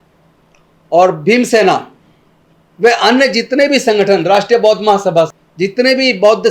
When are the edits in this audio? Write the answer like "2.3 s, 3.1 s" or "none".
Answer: 5.3 s